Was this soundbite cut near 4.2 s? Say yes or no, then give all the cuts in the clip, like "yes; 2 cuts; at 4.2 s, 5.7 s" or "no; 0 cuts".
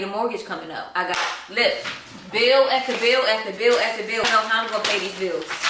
yes; 1 cut; at 4.2 s